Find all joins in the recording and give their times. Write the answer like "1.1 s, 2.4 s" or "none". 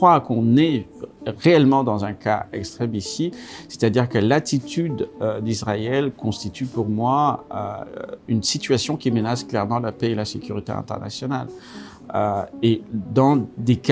none